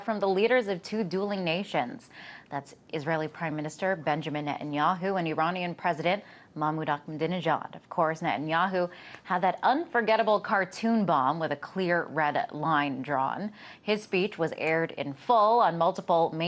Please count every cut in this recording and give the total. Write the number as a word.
zero